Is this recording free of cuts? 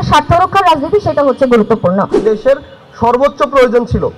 no; 1 cut; at 2.2 s

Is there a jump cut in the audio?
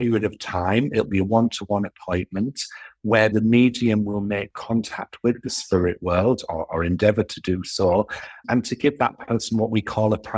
yes; 2 cuts; at 3.3 s, 8.4 s

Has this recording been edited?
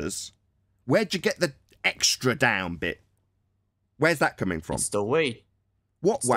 no; 0 cuts

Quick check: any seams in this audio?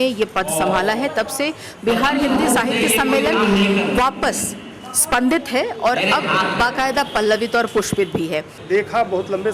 yes; 1 cut; at 8.6 s

